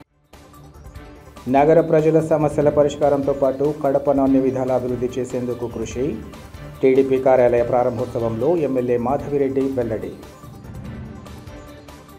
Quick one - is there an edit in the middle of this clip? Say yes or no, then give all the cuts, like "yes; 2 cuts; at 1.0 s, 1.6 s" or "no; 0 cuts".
yes; 1 cut; at 1.1 s